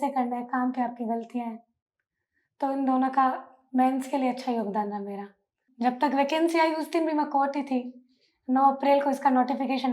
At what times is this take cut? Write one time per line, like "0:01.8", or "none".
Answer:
0:05.6